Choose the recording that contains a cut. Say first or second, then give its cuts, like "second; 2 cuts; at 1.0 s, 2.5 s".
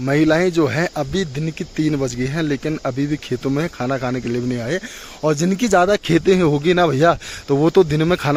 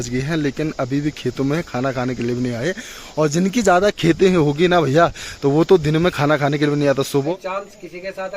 second; 1 cut; at 7.3 s